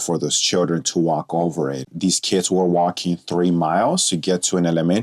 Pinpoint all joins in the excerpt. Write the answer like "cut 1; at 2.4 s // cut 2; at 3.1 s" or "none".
cut 1; at 1.9 s